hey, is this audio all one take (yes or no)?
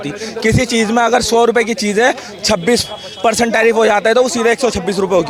yes